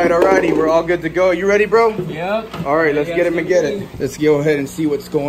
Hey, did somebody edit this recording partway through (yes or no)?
no